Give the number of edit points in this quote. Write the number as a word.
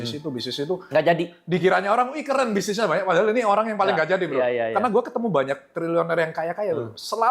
zero